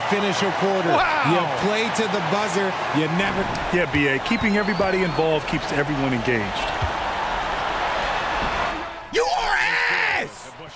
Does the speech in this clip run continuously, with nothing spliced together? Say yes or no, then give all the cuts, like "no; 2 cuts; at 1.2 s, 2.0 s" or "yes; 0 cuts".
no; 1 cut; at 3.4 s